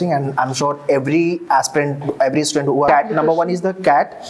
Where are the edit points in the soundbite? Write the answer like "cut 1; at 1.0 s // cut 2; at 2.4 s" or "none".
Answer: cut 1; at 2.9 s